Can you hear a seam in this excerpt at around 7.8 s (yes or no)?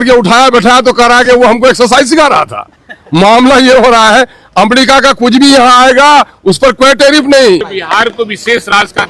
yes